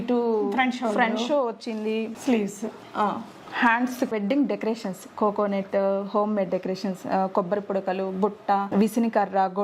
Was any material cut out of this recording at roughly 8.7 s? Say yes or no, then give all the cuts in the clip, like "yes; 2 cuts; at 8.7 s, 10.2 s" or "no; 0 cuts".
yes; 3 cuts; at 2.1 s, 4.1 s, 8.7 s